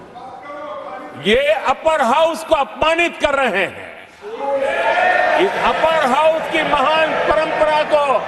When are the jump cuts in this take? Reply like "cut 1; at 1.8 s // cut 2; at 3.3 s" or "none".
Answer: none